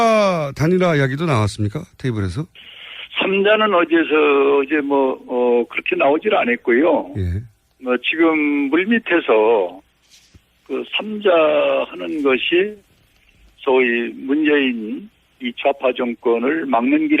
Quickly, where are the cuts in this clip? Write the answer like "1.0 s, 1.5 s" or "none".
14.3 s